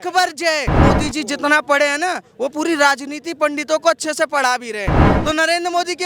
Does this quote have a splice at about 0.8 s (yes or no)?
yes